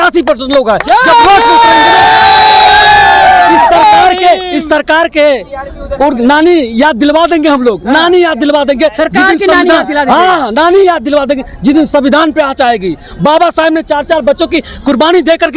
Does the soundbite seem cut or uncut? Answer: uncut